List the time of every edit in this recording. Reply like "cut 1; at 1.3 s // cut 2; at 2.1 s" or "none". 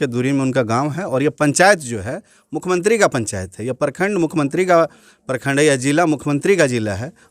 none